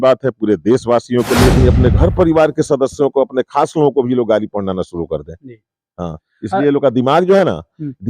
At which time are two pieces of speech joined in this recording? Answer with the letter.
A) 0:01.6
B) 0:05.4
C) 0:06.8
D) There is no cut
A